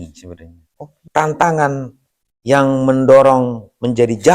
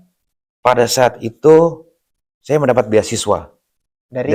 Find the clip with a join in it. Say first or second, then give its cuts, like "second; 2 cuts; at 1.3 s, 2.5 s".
first; 1 cut; at 0.9 s